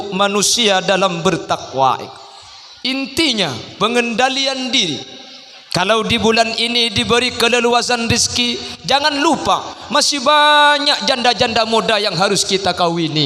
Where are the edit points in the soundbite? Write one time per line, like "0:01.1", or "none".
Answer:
none